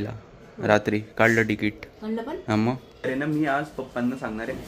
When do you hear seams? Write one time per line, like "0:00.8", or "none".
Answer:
0:03.0